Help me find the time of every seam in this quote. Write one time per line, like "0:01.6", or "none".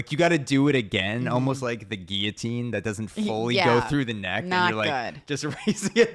none